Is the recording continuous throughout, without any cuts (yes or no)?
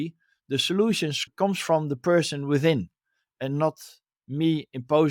no